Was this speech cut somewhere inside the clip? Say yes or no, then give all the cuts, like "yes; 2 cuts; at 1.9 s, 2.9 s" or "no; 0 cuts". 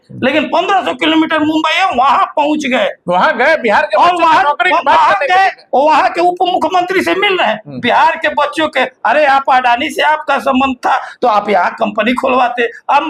no; 0 cuts